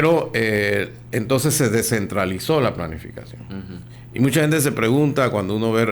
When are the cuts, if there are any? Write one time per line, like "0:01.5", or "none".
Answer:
0:03.9